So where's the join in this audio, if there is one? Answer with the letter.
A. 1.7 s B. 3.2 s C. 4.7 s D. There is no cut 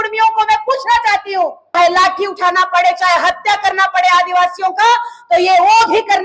A